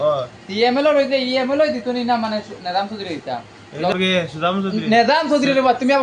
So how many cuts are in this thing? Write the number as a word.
one